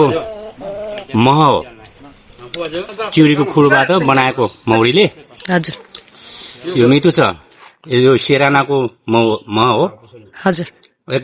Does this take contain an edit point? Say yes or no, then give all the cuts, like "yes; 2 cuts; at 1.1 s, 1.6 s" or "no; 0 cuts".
yes; 1 cut; at 2.9 s